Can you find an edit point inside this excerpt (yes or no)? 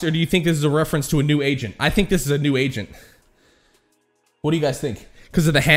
no